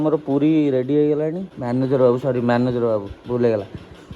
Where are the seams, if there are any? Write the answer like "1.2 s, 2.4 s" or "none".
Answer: 1.5 s